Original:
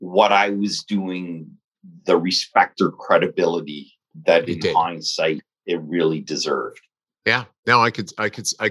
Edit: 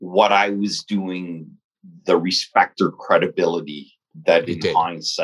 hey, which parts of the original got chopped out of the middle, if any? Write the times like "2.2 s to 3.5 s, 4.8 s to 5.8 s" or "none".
none